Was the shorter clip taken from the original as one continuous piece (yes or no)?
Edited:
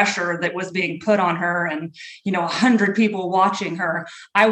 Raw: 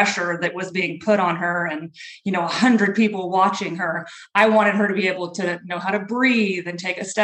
yes